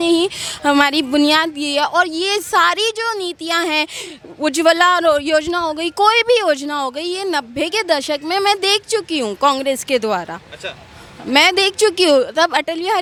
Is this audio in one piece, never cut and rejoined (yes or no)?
yes